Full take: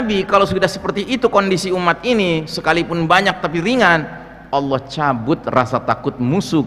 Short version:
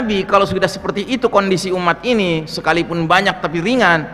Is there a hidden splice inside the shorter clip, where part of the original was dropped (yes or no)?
no